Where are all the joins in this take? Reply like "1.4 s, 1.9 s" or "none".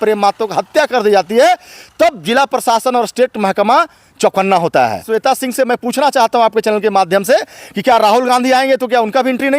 5.0 s